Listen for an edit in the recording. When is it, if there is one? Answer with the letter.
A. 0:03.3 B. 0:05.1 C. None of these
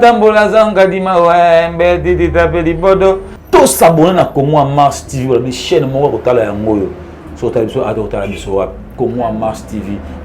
A